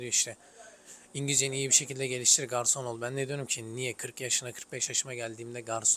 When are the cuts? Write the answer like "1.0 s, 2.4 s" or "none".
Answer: none